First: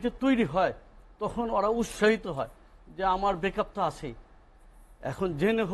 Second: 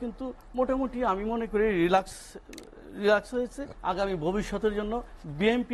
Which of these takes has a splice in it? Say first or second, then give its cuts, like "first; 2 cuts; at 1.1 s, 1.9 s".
second; 1 cut; at 3.7 s